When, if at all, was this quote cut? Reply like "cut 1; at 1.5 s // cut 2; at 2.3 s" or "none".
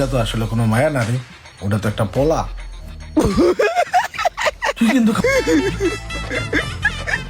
cut 1; at 5.2 s